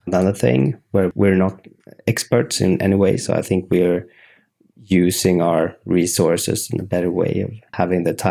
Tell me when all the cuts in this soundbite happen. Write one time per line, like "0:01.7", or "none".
none